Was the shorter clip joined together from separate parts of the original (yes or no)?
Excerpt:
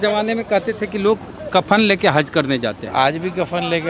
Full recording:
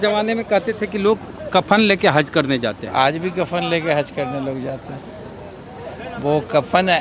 no